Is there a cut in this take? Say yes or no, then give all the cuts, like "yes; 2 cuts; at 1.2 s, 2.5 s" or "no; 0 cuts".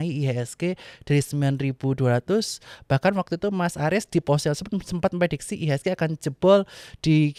no; 0 cuts